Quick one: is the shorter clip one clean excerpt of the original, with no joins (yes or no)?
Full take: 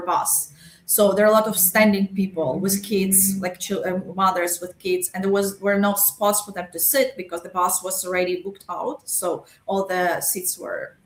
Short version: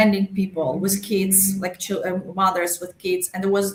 yes